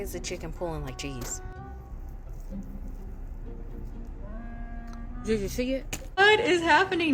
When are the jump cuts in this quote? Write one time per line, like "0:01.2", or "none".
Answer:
0:06.2